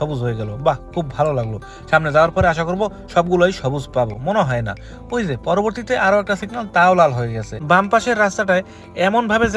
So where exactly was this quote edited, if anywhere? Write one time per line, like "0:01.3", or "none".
0:07.5